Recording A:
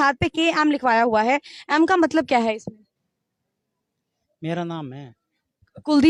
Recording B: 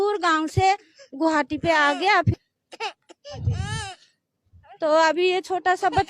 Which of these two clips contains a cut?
B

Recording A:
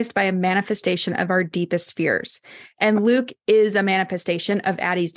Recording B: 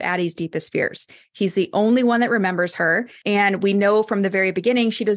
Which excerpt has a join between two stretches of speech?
B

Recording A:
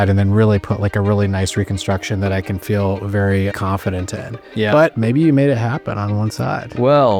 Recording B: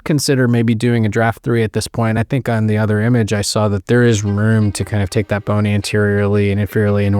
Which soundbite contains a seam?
B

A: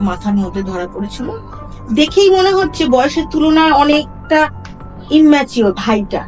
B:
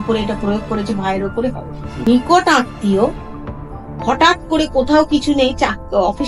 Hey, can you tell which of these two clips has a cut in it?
B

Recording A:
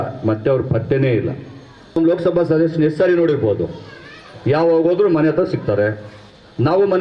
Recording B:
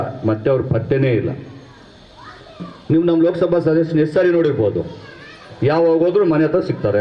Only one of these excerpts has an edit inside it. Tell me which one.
A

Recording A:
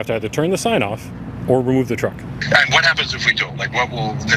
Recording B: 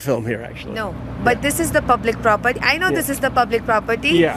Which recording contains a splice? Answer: A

